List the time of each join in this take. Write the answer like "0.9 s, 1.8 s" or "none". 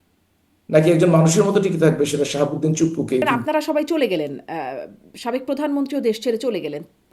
3.2 s